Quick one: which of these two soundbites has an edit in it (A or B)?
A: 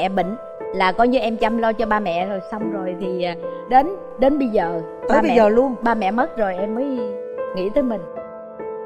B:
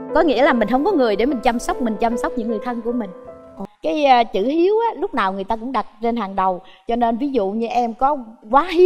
B